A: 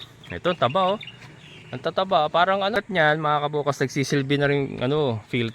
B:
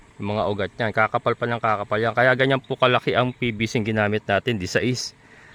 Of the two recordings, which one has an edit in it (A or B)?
A